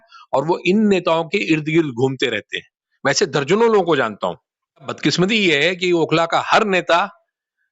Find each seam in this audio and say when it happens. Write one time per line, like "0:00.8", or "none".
0:04.9